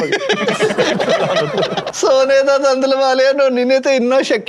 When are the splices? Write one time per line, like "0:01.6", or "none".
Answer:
0:01.9

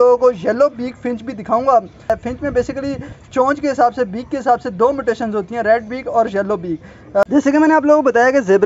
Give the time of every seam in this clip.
0:02.1
0:07.2

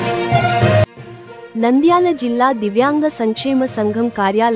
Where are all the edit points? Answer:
0:01.0

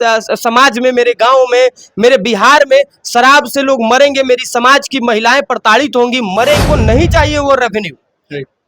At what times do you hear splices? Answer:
0:06.6

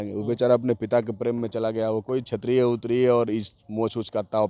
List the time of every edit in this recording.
none

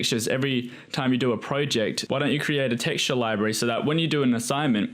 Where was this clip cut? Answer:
0:02.0

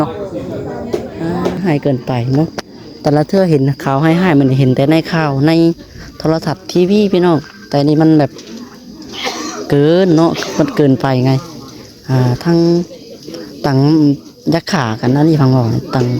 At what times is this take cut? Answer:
0:01.6

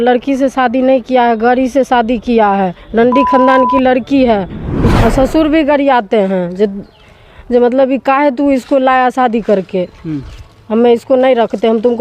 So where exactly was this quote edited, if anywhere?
0:04.9

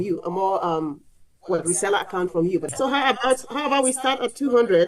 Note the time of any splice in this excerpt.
0:02.7

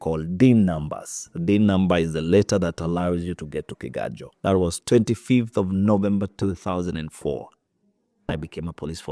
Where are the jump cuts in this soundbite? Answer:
0:04.8

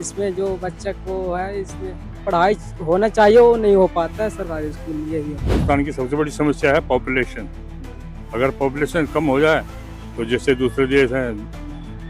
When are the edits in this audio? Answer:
0:02.2
0:05.6

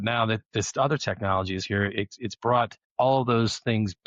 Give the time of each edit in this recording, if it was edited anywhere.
0:02.8

